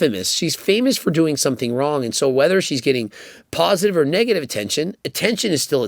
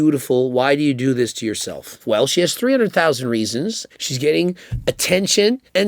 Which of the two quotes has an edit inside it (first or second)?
second